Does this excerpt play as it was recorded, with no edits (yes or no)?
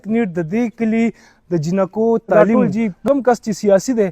no